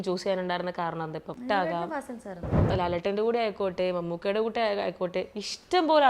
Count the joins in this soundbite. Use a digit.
2